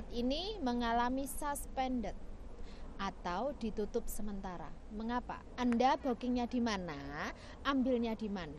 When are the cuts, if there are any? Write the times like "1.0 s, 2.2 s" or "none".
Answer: 5.4 s